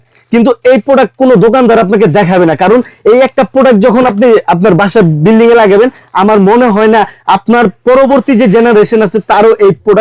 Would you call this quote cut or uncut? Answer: uncut